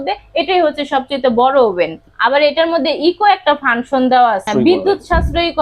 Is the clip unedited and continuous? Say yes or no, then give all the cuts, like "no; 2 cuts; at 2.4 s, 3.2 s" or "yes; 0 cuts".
no; 2 cuts; at 2.0 s, 4.5 s